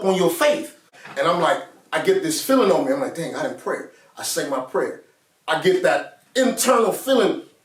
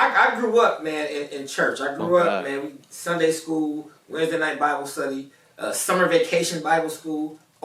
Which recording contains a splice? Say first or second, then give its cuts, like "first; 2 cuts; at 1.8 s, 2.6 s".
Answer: first; 1 cut; at 1.0 s